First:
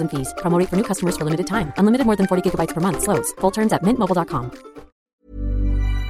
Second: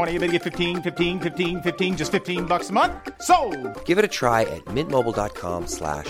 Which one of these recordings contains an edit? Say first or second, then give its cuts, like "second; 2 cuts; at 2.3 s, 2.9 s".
first; 1 cut; at 5.1 s